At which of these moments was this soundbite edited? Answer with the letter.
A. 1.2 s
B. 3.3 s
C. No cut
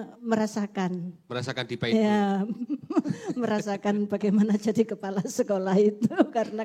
C